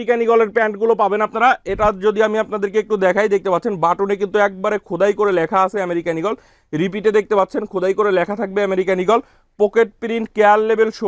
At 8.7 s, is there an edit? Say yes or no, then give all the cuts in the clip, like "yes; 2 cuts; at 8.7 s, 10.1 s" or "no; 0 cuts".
no; 0 cuts